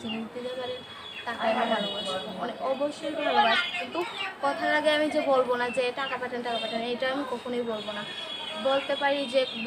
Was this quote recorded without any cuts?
yes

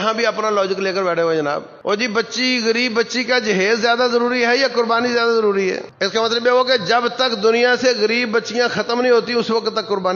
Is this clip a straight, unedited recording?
no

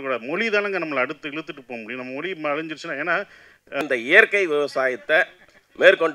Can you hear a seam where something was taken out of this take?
yes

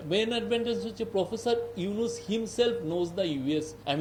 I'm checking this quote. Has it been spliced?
no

